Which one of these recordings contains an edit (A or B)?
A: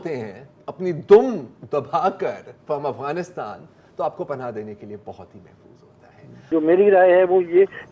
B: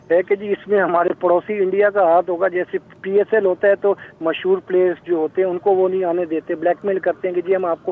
A